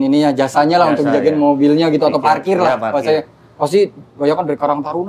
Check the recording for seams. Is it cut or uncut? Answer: uncut